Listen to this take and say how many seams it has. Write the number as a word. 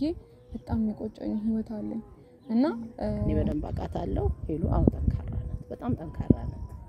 one